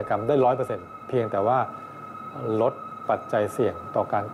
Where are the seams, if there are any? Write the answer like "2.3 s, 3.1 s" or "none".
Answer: 1.0 s